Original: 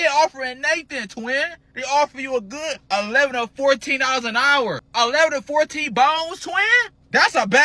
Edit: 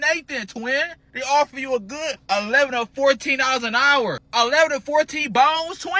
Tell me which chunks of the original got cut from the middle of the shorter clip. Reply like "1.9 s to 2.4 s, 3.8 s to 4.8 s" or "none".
none